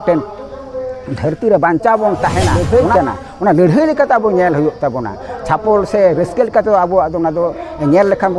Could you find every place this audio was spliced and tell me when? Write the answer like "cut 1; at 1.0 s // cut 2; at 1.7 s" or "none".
cut 1; at 2.6 s